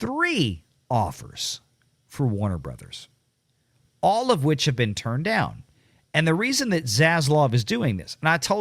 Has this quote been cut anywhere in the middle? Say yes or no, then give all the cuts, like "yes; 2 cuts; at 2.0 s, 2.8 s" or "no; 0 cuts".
no; 0 cuts